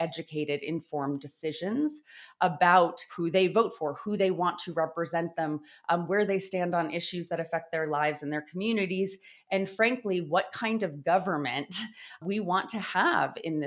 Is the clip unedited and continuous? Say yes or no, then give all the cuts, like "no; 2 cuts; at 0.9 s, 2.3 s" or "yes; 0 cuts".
no; 1 cut; at 12.2 s